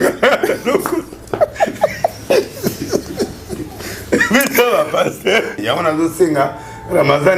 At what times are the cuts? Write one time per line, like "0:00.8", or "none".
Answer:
0:05.5

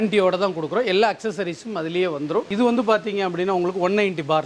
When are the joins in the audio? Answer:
0:02.5

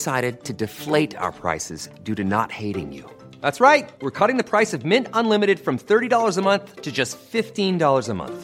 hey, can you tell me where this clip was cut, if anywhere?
none

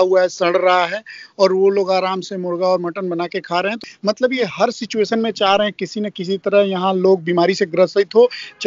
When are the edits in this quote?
0:03.8

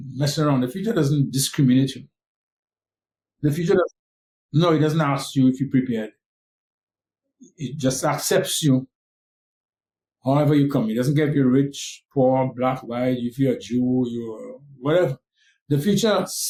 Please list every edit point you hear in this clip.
none

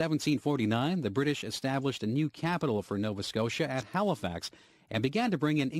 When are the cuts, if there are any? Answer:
none

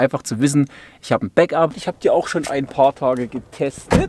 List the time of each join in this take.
0:01.8

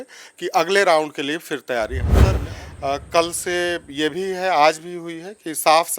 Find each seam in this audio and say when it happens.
0:02.4

